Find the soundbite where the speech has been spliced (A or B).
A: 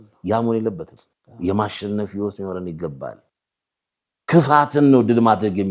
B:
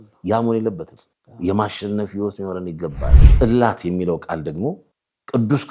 B